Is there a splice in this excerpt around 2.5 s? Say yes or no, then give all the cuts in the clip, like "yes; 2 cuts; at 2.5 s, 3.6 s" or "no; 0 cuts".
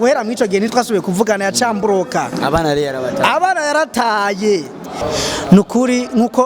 no; 1 cut; at 4.9 s